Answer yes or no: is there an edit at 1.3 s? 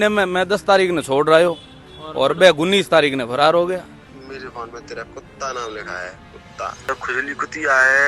no